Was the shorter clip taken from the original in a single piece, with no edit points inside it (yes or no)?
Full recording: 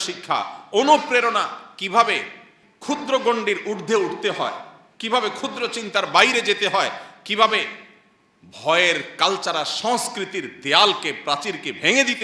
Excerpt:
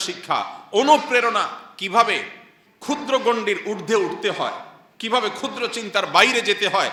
yes